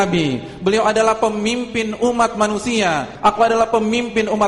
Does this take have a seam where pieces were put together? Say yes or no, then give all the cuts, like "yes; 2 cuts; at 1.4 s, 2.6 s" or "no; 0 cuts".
yes; 1 cut; at 3.1 s